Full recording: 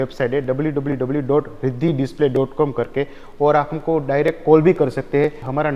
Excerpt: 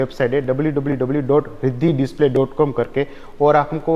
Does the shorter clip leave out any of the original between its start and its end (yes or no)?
no